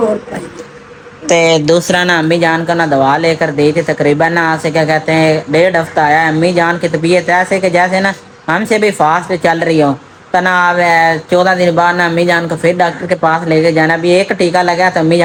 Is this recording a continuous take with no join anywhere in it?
yes; 0 cuts

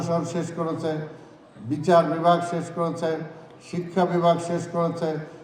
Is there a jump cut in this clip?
no; 0 cuts

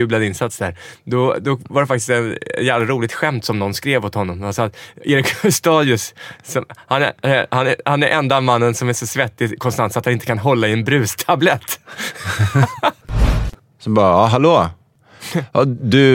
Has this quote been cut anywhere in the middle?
yes; 2 cuts; at 13.2 s, 14.9 s

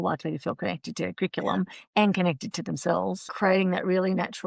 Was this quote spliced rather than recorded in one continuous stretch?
yes; 1 cut; at 3.3 s

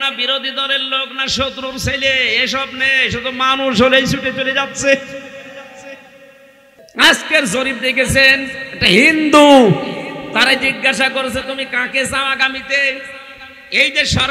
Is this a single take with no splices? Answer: no; 1 cut; at 6.9 s

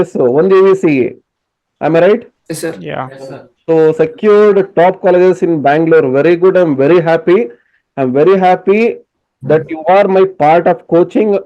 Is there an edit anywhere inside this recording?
yes; 1 cut; at 2.3 s

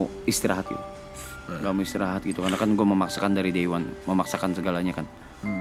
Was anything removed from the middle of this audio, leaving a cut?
no; 0 cuts

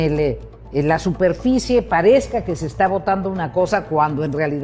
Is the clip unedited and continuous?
yes; 0 cuts

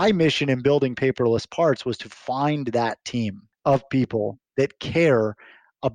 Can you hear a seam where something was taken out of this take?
yes; 1 cut; at 3.5 s

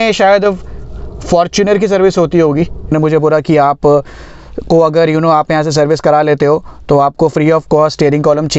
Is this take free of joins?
no; 1 cut; at 2.9 s

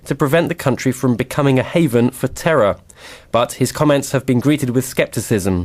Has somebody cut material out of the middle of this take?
no; 0 cuts

